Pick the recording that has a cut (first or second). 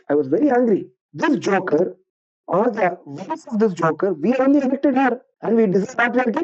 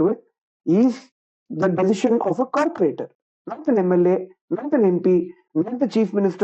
first